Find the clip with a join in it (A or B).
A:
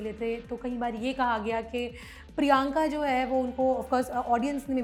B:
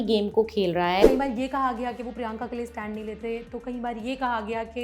B